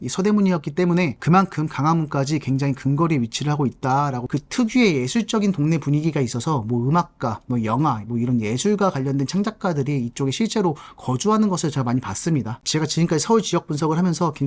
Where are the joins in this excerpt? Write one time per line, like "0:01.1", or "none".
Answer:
0:04.2
0:12.6